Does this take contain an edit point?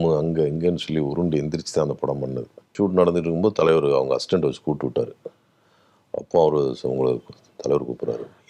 yes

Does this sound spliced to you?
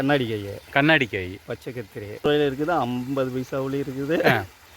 yes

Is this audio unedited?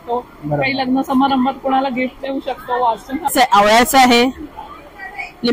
no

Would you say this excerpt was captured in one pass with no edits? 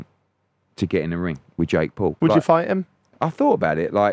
no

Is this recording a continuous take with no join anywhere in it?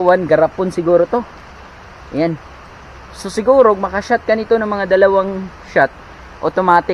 yes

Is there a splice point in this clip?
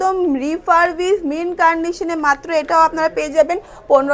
no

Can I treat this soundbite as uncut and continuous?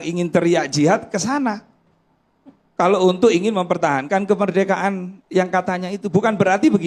yes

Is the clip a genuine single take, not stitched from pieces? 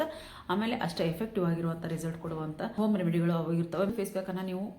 no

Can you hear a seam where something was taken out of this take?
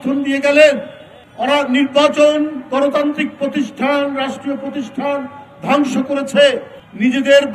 no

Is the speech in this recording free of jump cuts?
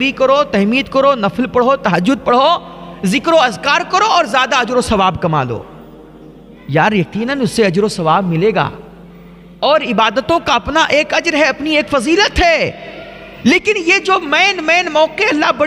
yes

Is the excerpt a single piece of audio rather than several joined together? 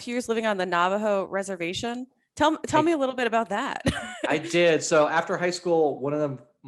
yes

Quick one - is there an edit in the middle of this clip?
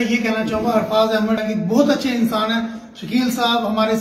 yes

